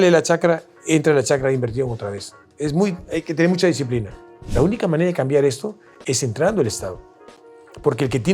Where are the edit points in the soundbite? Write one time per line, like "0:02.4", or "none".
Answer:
0:04.4